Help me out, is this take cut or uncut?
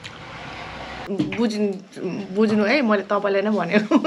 cut